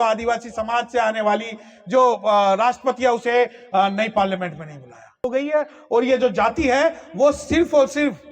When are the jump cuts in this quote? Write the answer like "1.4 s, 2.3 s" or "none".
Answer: 5.2 s